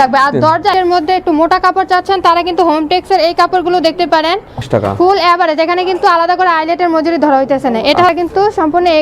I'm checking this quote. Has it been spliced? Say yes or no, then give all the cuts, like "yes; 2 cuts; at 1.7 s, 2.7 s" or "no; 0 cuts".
yes; 3 cuts; at 0.7 s, 4.6 s, 8.1 s